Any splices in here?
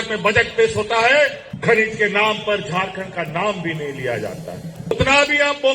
yes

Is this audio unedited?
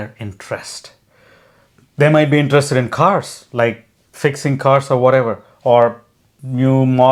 yes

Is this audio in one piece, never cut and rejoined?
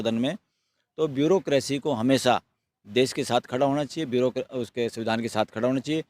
yes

